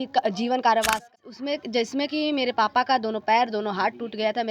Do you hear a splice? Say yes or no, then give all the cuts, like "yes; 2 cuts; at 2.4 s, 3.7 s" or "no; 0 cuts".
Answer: yes; 1 cut; at 1.0 s